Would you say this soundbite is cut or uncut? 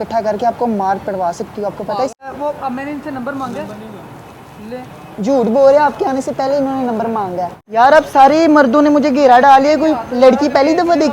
cut